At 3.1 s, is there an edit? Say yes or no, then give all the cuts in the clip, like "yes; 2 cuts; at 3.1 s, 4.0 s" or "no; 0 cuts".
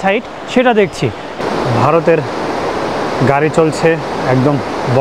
no; 1 cut; at 1.4 s